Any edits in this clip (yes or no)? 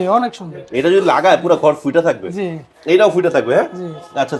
no